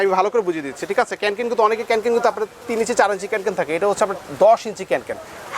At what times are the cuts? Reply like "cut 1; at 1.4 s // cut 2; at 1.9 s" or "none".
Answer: none